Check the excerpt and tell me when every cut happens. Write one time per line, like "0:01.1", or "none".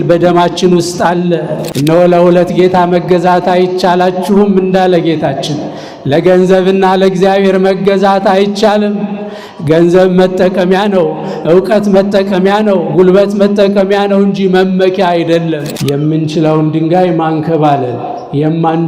0:01.7
0:15.7